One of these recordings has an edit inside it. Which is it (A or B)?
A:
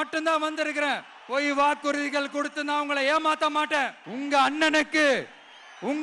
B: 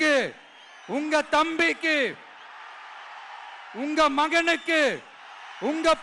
A